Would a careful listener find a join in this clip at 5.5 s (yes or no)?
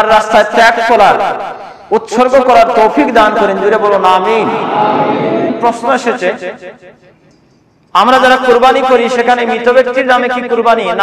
yes